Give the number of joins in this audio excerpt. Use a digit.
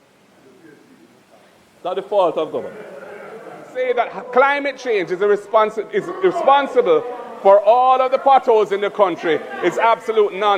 1